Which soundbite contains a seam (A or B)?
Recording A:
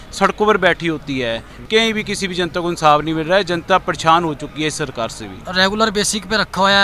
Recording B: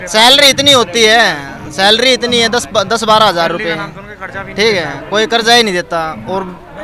A